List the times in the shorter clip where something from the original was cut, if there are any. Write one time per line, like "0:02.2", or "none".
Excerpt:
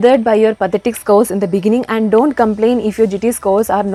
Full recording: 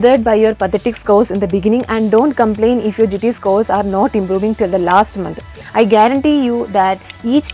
none